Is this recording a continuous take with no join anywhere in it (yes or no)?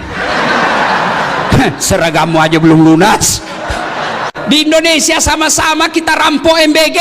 no